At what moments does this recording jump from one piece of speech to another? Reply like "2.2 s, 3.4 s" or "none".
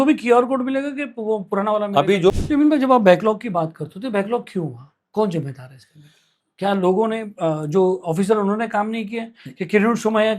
2.3 s